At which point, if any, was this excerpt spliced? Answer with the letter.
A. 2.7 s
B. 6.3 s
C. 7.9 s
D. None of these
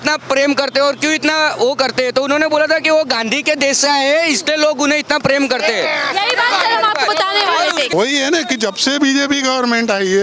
C